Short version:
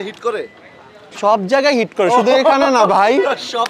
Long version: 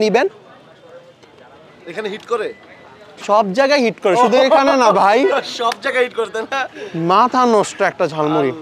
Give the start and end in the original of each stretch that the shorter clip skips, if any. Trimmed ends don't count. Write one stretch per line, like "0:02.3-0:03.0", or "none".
none